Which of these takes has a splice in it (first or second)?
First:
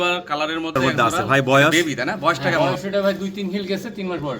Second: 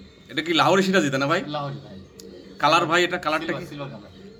first